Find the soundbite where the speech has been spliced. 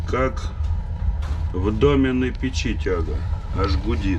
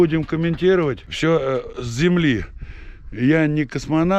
second; 1 cut; at 1.1 s

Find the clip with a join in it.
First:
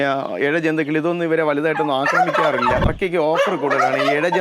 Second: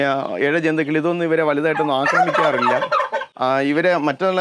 first; 1 cut; at 2.9 s

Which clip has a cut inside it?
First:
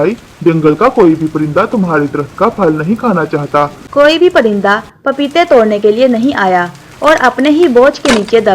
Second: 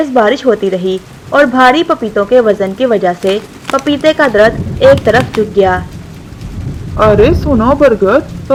first; 1 cut; at 3.8 s

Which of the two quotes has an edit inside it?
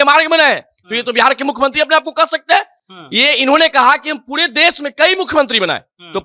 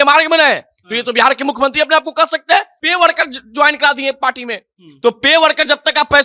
second; 1 cut; at 2.8 s

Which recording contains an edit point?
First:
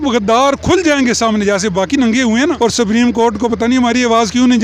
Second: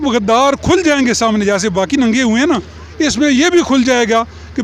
first; 1 cut; at 2.5 s

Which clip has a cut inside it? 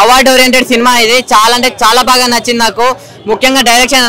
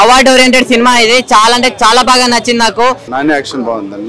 second; 1 cut; at 3.1 s

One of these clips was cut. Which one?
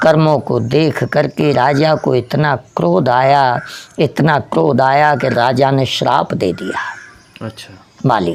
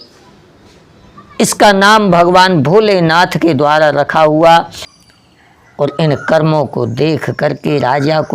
second; 1 cut; at 4.8 s

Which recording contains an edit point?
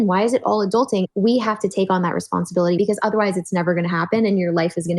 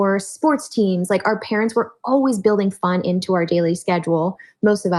first; 2 cuts; at 1.1 s, 2.8 s

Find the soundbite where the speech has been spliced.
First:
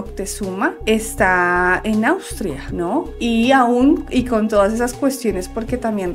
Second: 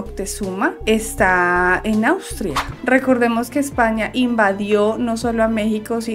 second; 1 cut; at 2.7 s

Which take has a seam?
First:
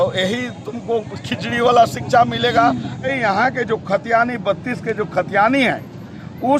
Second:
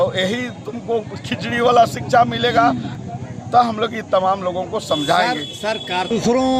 first; 1 cut; at 3.1 s

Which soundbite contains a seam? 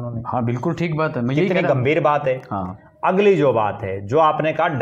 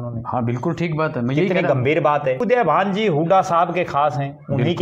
second; 1 cut; at 2.4 s

